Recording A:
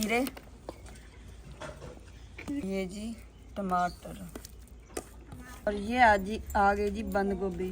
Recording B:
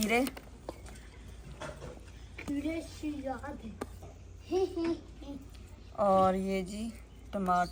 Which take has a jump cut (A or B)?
A